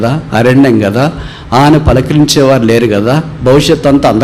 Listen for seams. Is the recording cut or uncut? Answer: uncut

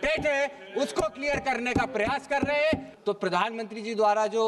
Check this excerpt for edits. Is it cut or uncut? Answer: cut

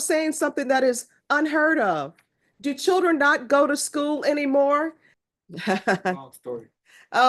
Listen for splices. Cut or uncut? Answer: cut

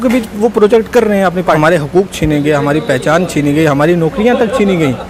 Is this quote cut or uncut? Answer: cut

